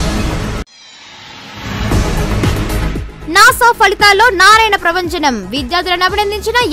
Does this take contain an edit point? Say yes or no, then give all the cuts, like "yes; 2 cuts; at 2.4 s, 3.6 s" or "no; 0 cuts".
yes; 1 cut; at 2.4 s